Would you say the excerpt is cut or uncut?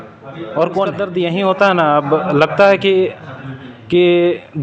cut